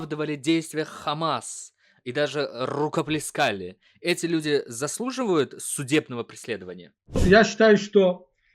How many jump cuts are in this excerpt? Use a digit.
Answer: 1